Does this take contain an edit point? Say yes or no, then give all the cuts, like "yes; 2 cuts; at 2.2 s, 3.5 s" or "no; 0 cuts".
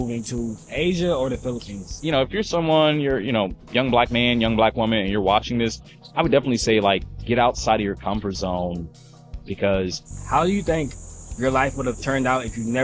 yes; 2 cuts; at 2.0 s, 10.2 s